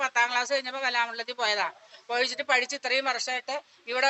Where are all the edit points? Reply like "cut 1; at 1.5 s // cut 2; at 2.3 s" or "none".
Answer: none